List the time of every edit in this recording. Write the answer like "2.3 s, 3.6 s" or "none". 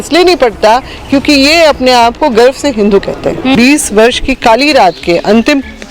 3.5 s